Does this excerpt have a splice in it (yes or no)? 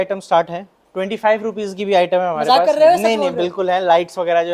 no